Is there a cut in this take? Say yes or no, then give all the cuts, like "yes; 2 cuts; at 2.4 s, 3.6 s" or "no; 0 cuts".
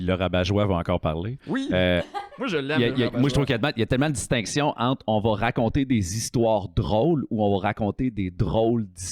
no; 0 cuts